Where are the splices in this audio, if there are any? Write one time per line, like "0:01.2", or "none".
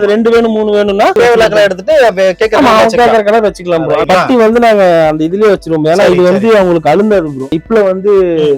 0:01.1
0:04.0
0:07.6